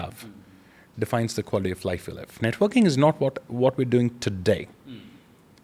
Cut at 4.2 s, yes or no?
no